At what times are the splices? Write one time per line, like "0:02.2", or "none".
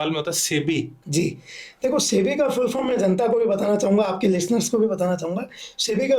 none

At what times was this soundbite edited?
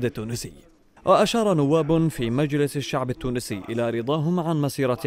none

